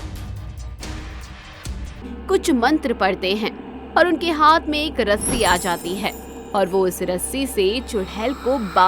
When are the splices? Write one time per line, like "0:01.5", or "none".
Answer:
0:02.2